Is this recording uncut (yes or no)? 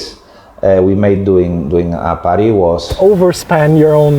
no